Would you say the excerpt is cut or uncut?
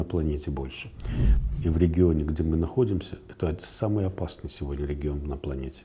cut